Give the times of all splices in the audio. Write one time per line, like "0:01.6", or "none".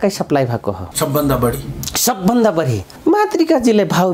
0:00.9
0:02.8